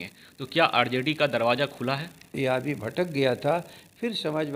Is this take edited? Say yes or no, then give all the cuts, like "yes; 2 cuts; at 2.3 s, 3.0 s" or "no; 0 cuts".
yes; 1 cut; at 2.3 s